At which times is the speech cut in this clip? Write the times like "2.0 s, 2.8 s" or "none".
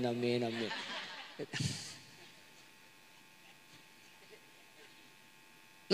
0.9 s